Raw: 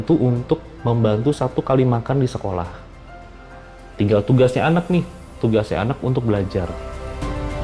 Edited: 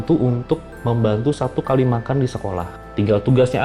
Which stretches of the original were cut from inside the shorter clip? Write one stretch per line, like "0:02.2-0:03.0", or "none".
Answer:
0:02.8-0:03.8

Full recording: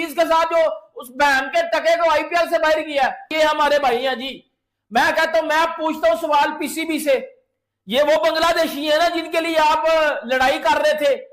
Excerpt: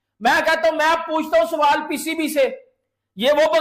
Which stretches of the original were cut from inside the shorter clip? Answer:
none

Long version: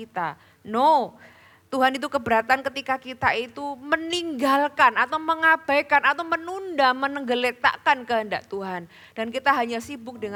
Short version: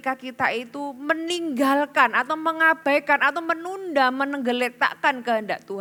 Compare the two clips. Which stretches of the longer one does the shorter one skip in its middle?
none

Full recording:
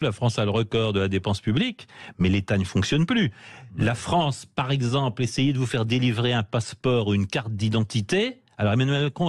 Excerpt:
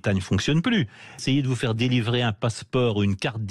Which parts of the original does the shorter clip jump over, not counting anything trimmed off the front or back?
0:03.6-0:05.3

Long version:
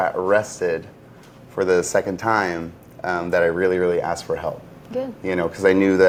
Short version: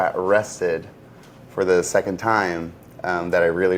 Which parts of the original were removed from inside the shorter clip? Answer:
none

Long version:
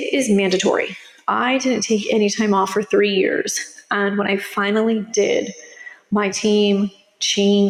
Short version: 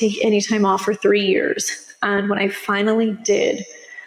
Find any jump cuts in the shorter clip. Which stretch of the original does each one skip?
none

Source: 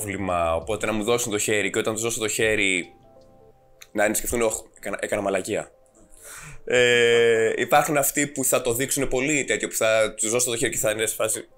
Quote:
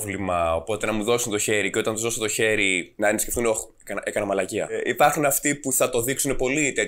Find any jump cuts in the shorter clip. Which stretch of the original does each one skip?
0:02.9-0:03.8
0:05.7-0:07.5

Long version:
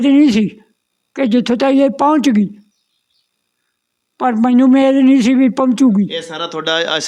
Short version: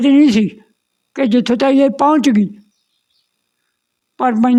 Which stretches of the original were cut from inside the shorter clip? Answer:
none

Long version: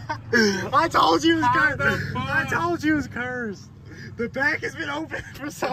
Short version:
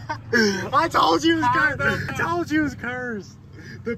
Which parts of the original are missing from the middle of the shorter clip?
0:02.1-0:02.4

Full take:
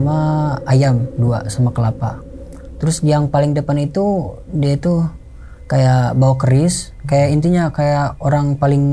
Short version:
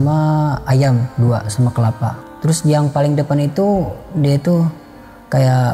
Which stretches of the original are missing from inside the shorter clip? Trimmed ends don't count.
0:02.2-0:02.6

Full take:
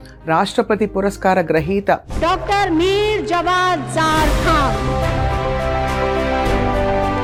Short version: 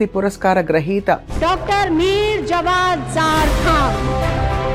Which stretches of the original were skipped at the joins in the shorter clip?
none

